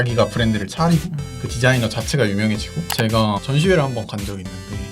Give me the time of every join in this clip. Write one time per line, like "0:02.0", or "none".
0:02.9